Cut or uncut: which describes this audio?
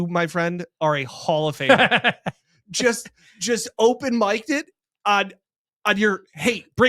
uncut